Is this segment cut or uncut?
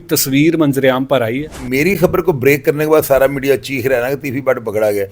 cut